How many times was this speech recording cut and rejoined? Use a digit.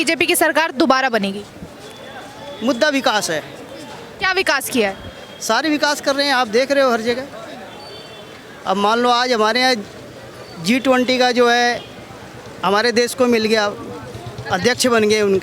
0